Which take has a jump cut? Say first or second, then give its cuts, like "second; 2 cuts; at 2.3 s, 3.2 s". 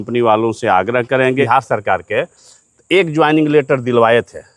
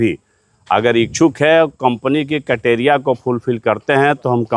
first; 1 cut; at 1.4 s